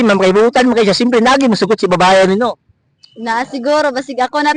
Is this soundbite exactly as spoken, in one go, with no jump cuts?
yes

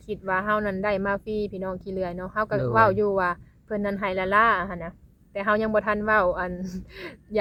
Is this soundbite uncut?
yes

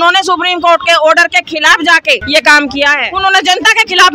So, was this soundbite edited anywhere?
yes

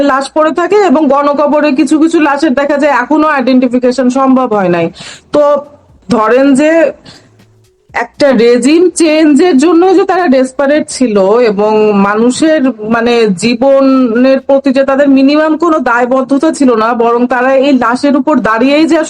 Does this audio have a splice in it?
yes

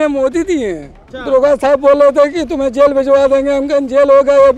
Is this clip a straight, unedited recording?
no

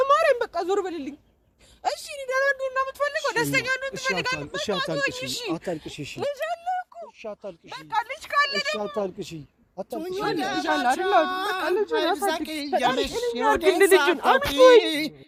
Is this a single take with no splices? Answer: yes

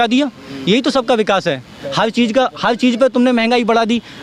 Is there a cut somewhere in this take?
no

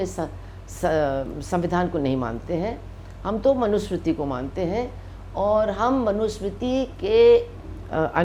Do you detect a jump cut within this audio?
no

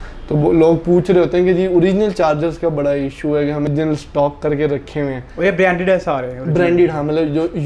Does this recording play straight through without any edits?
no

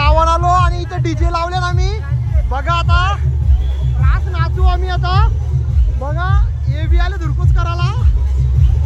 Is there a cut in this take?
no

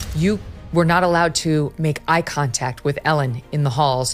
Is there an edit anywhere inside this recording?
no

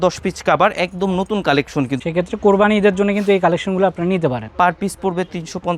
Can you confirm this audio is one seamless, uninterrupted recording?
no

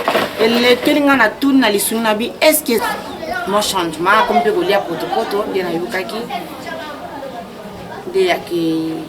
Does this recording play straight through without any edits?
no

